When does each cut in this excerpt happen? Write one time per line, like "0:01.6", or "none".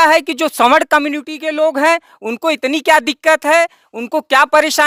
none